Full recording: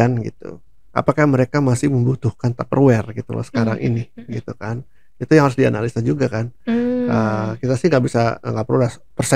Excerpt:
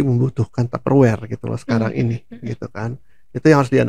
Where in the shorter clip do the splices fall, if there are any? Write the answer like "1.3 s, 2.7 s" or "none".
none